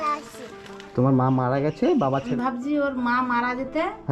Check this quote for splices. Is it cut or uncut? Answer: cut